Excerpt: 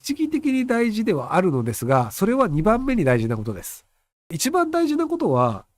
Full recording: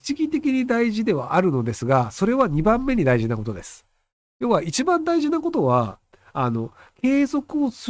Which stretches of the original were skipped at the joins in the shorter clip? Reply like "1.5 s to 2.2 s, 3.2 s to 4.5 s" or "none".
4.3 s to 4.7 s